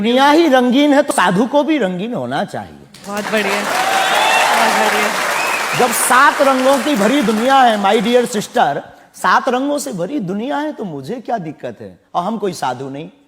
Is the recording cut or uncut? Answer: cut